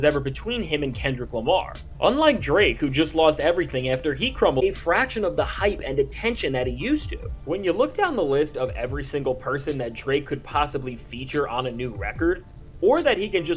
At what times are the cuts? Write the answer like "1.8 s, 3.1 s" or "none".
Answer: 4.6 s